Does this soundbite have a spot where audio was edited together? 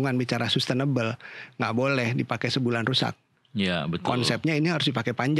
no; 0 cuts

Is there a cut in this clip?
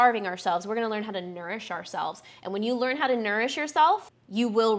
no; 0 cuts

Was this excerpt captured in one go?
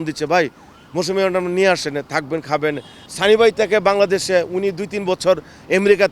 no; 1 cut; at 3.0 s

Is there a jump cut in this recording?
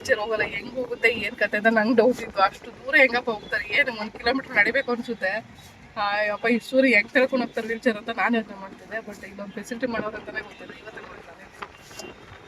no; 0 cuts

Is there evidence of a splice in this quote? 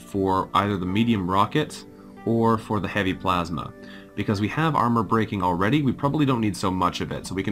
no; 0 cuts

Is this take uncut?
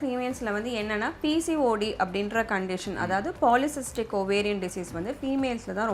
yes; 0 cuts

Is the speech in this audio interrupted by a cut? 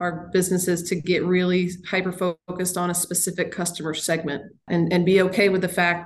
yes; 1 cut; at 4.6 s

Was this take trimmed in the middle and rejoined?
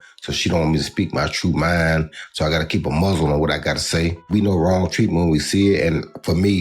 yes; 1 cut; at 4.2 s

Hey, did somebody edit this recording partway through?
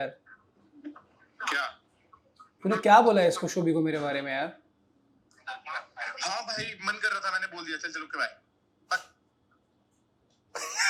no; 0 cuts

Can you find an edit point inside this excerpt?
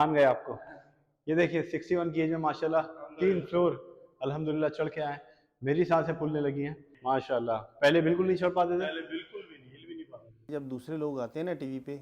yes; 2 cuts; at 6.8 s, 10.5 s

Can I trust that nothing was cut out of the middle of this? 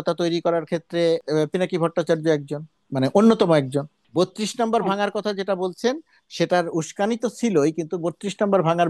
no; 2 cuts; at 2.8 s, 4.0 s

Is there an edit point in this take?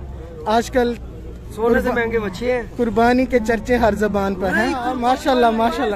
yes; 1 cut; at 5.0 s

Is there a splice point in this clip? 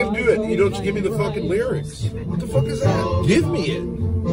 yes; 1 cut; at 2.2 s

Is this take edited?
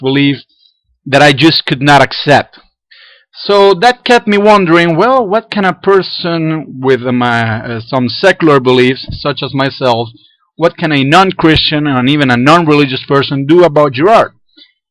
no; 0 cuts

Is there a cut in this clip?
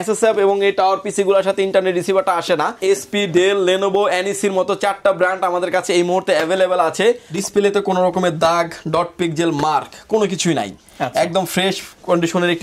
yes; 2 cuts; at 2.8 s, 7.3 s

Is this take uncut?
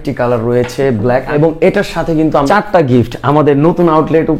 no; 2 cuts; at 1.3 s, 2.5 s

